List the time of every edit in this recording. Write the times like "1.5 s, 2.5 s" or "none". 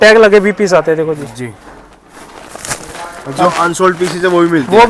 none